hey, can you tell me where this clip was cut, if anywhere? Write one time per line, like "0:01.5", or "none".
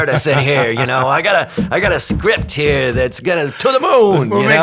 none